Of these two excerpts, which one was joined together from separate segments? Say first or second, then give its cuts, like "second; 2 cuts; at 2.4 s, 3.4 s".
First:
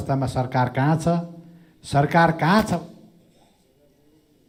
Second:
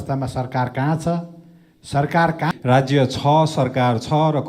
second; 1 cut; at 2.5 s